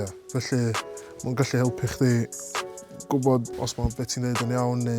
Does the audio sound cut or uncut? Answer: cut